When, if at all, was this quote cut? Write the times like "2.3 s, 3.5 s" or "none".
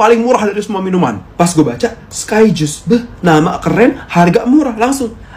none